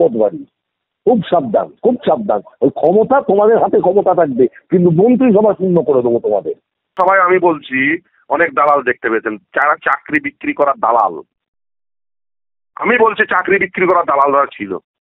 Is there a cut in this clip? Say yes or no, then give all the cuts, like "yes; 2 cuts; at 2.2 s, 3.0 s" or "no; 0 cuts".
yes; 1 cut; at 6.8 s